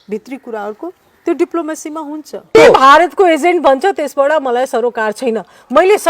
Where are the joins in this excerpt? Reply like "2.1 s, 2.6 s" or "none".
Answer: 2.5 s